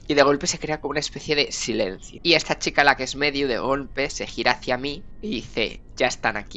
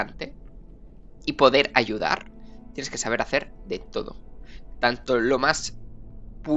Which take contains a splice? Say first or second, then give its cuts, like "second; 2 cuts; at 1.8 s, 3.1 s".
first; 2 cuts; at 2.1 s, 5.1 s